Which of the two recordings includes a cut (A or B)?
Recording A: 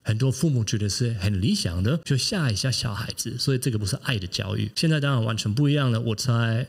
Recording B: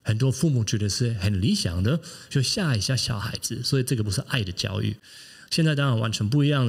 A